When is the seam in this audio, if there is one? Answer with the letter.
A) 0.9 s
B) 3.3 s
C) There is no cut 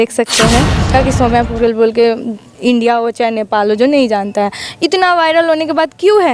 A